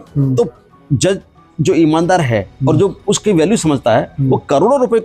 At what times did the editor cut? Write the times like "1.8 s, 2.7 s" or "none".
none